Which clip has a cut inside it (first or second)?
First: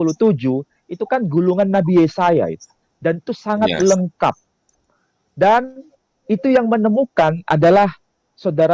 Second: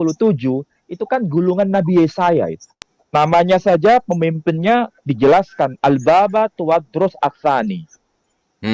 second